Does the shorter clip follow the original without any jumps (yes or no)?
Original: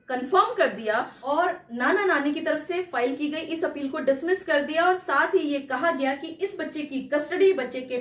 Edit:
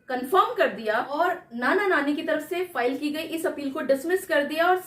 no